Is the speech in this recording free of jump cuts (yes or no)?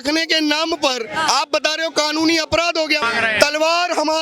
no